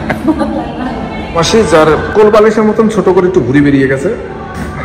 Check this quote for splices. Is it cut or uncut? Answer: uncut